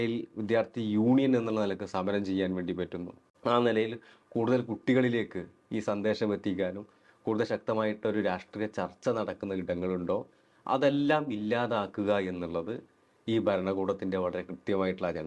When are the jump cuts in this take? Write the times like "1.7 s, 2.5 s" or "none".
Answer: none